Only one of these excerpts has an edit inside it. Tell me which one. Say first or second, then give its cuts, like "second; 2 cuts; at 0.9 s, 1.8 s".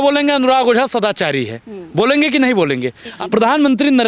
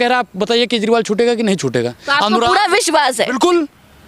first; 1 cut; at 3.1 s